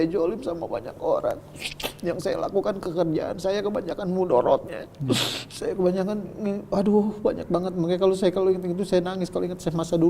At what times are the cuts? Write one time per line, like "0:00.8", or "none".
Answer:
none

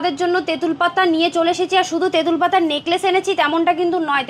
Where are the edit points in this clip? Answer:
none

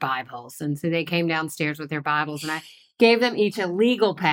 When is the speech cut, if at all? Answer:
none

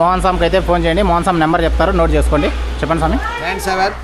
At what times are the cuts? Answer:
none

